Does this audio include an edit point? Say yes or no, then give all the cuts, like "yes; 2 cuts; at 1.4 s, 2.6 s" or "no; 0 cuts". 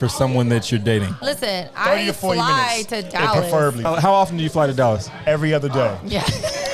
yes; 2 cuts; at 1.1 s, 3.9 s